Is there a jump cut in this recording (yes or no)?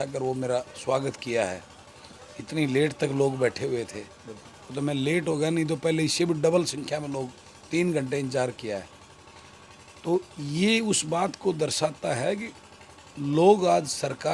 no